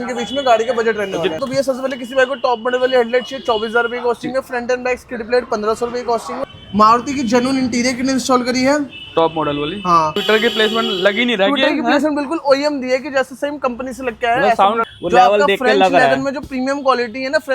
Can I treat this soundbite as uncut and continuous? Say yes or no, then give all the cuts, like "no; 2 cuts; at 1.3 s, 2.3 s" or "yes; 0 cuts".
no; 4 cuts; at 1.4 s, 6.4 s, 10.2 s, 14.8 s